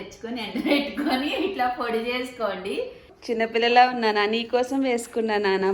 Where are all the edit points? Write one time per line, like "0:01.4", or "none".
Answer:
0:03.2